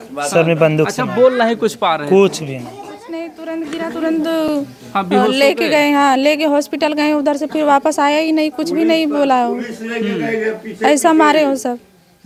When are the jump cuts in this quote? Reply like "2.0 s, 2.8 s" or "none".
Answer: none